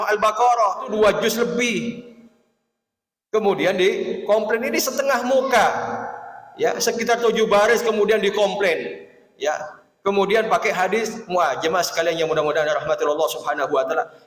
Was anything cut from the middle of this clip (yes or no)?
yes